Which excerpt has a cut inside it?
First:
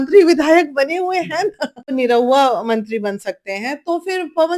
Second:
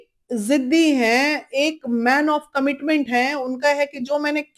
first; 1 cut; at 1.9 s

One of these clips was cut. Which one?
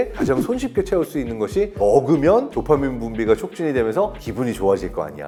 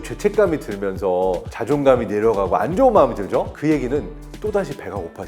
second; 3 cuts; at 1.5 s, 3.5 s, 4.2 s

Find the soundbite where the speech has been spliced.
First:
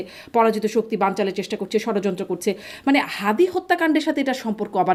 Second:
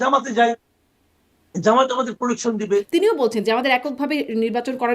second; 1 cut; at 2.9 s

